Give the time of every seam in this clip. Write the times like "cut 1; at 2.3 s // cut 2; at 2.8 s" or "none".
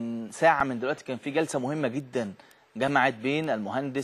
none